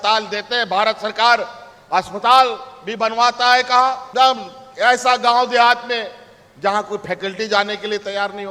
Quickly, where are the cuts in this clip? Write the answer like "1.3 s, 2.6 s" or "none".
none